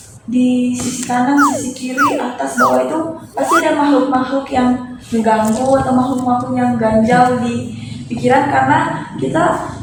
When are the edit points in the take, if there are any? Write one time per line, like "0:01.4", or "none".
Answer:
none